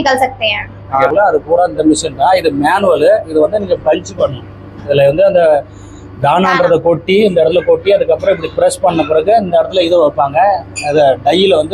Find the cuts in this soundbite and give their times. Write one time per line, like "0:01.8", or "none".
0:01.0